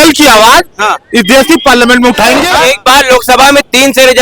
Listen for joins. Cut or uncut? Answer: cut